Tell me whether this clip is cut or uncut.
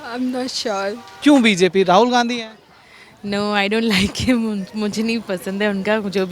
cut